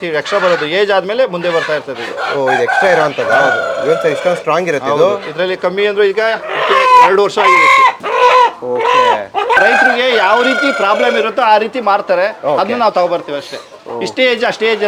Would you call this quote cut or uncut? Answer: uncut